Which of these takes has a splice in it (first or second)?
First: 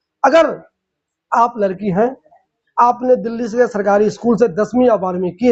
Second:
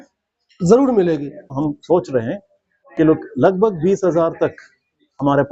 second